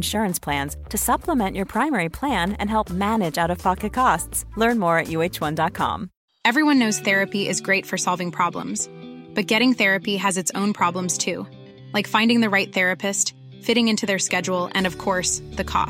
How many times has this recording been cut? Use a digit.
1